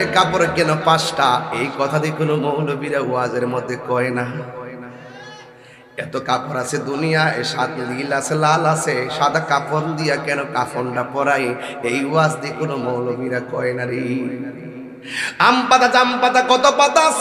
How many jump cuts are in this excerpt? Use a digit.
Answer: 0